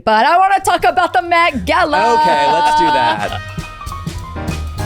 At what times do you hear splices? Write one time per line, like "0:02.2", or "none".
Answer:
0:03.3